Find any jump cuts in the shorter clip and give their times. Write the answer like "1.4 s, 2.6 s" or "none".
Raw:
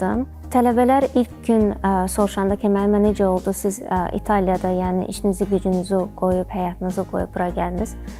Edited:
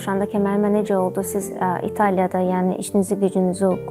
none